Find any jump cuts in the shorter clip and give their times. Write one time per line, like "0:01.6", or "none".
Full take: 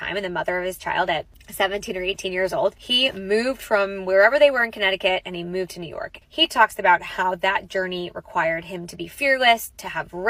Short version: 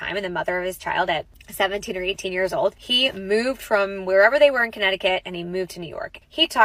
none